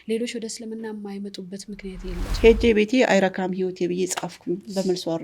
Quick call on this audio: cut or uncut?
cut